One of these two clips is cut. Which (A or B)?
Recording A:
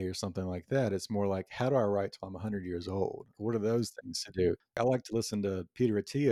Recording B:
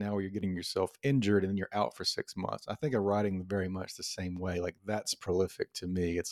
A